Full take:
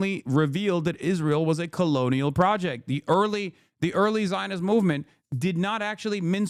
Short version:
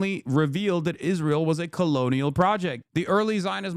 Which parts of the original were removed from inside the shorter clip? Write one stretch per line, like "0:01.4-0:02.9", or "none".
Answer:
0:02.8-0:03.7